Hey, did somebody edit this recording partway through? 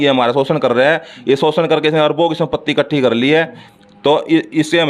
no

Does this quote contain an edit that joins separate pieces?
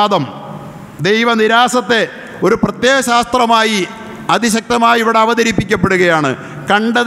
no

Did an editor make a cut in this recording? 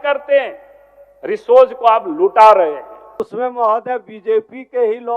yes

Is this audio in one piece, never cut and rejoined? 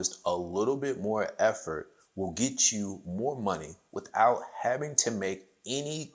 yes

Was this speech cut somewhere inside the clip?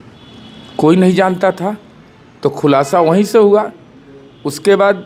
no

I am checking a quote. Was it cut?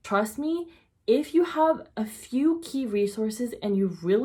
no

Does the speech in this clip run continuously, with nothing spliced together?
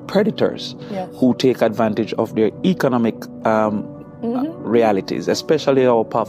yes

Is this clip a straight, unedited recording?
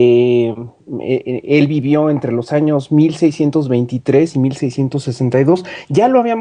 yes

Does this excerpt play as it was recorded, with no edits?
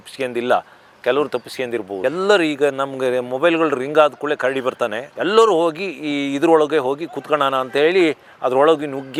yes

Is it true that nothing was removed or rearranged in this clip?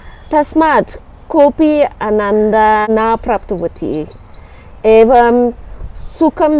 no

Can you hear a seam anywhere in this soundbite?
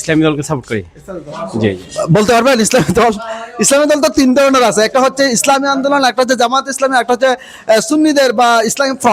no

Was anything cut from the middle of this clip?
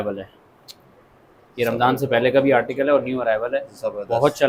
no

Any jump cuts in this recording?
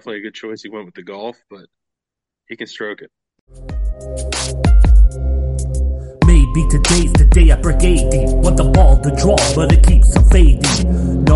yes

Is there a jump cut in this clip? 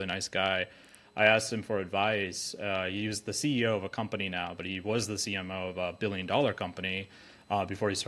no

